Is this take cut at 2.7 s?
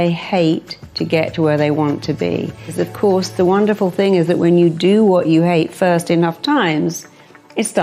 yes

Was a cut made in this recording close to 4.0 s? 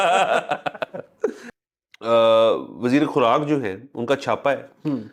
no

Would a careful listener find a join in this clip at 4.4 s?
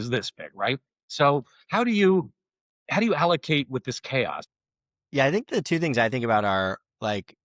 yes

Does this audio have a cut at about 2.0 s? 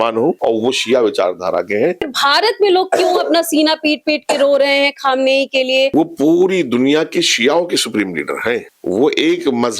yes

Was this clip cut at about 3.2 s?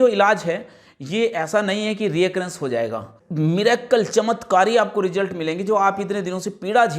yes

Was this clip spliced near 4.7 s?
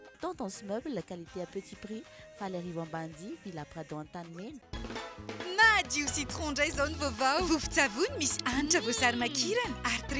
yes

